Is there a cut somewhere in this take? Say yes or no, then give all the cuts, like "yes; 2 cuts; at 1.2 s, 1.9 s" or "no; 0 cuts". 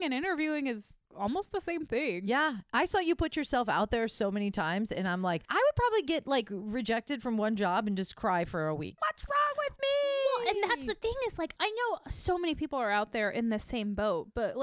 yes; 3 cuts; at 1.0 s, 9.0 s, 11.5 s